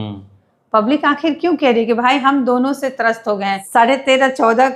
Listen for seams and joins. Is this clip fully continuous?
no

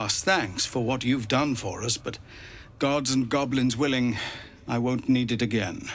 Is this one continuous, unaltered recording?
yes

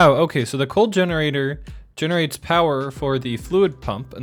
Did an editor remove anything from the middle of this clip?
no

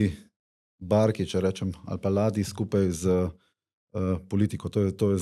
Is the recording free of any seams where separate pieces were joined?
yes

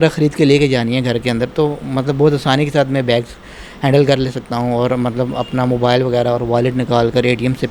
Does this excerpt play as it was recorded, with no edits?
yes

